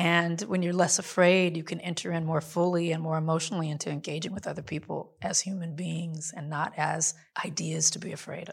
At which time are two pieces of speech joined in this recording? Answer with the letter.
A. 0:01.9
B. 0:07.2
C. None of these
B